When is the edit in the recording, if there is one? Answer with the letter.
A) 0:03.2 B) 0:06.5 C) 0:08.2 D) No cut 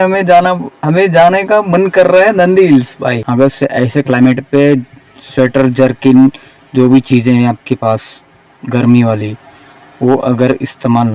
A